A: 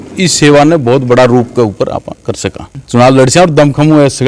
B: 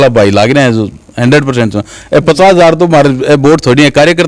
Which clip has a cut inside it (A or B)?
A